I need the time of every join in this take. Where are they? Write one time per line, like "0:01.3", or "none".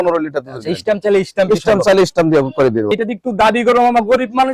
0:02.9